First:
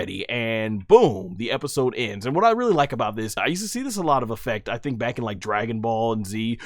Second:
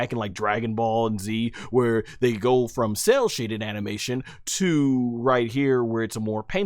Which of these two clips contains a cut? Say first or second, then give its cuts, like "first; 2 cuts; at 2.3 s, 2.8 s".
first; 1 cut; at 3.4 s